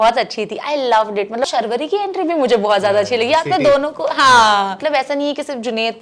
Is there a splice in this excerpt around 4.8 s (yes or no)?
yes